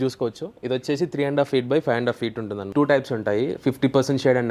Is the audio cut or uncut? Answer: cut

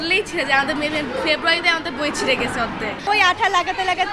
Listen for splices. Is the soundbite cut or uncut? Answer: cut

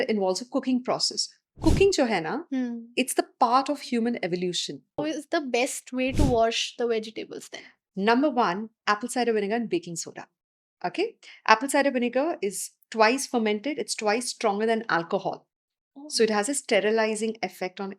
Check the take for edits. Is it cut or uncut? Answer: cut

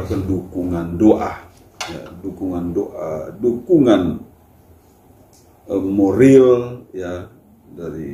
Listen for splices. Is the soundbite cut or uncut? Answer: uncut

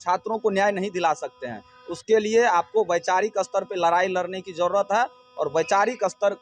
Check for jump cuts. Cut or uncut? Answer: uncut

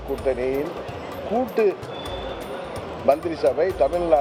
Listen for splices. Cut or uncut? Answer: uncut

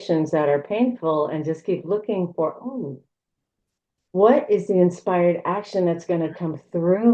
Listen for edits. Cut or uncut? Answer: uncut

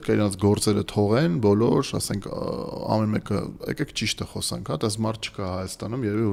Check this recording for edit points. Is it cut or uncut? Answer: uncut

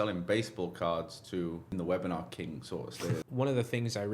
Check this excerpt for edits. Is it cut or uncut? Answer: cut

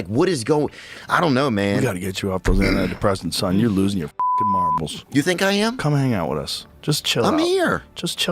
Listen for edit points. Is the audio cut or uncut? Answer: cut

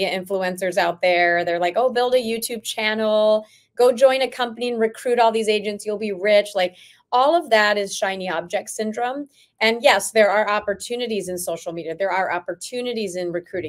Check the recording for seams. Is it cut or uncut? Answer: uncut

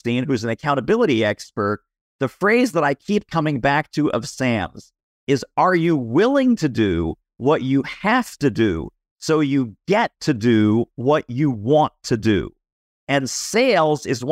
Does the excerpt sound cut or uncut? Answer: uncut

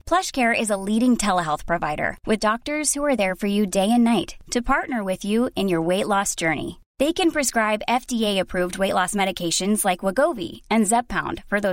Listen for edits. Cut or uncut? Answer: uncut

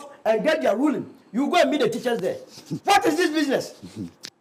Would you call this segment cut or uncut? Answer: uncut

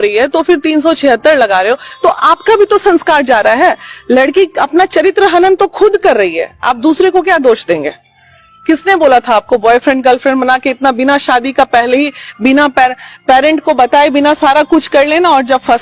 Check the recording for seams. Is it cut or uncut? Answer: uncut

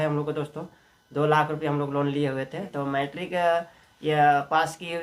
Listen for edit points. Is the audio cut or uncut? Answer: cut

